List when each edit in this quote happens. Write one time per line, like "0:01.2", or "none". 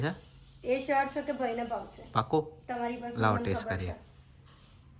none